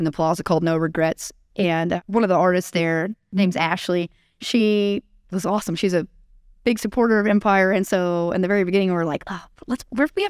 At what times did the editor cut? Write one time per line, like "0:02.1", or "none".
0:02.0
0:03.3

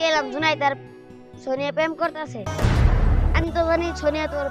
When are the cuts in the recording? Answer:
none

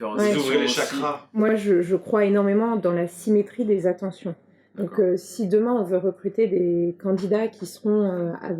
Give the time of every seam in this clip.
0:01.5

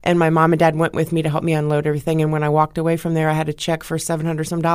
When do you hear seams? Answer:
none

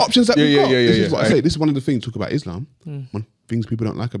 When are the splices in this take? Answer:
0:01.2

